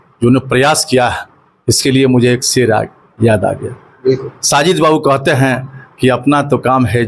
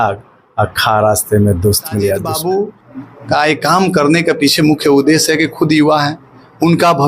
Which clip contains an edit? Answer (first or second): second